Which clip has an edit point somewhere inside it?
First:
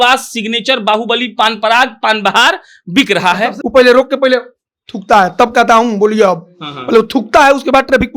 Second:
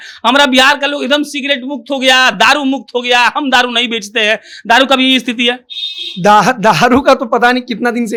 first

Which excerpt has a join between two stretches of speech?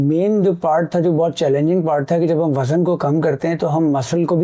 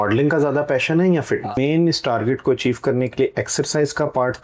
second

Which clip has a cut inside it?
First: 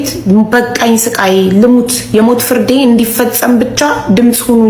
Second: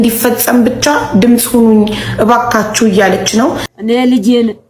second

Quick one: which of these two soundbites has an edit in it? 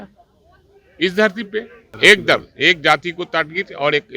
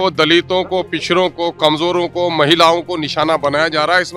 first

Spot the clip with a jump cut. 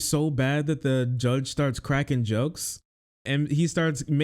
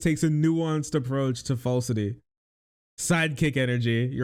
first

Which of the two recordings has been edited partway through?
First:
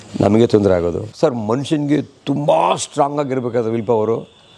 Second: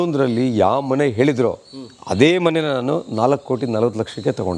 first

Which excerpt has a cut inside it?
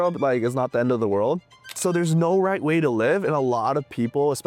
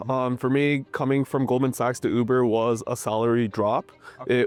first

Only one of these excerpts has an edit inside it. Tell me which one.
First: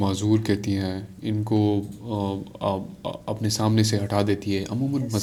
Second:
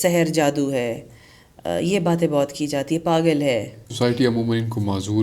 second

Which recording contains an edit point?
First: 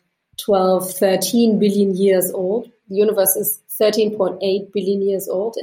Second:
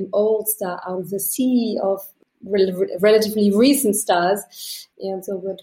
second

